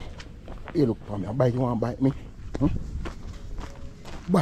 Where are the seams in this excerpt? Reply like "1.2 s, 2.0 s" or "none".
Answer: none